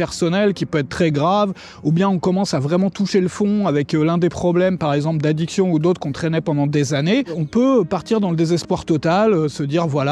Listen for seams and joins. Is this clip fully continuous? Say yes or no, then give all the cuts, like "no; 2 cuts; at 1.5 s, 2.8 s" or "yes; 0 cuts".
no; 1 cut; at 7.4 s